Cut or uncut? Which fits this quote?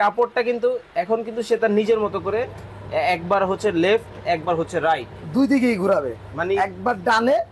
uncut